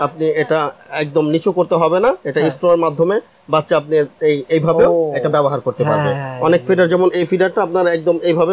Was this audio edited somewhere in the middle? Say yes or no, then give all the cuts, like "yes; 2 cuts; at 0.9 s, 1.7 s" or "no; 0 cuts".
no; 0 cuts